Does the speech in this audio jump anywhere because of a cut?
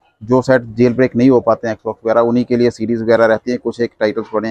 no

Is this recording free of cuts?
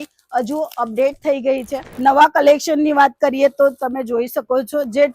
no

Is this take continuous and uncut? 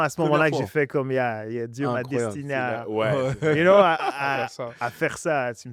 yes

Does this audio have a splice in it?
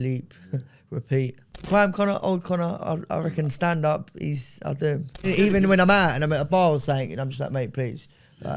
yes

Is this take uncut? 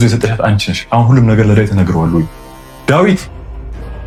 yes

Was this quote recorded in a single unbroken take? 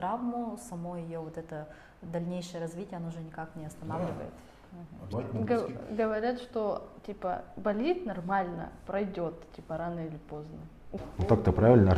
no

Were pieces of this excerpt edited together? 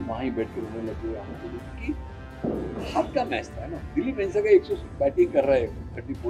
no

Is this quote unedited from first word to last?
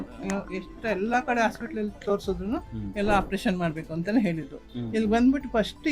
no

